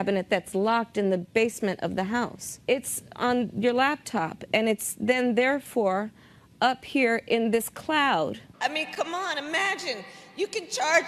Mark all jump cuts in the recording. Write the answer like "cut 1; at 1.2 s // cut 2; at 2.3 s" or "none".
cut 1; at 3.0 s // cut 2; at 8.4 s